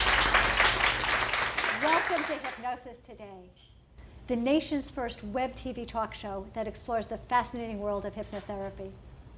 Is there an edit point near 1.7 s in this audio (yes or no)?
no